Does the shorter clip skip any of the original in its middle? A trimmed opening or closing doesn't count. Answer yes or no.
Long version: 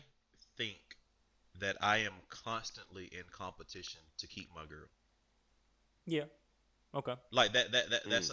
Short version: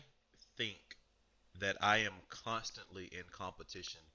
no